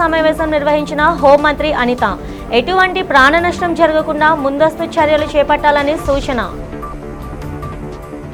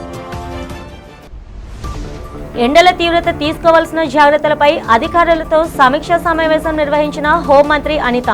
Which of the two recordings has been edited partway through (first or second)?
second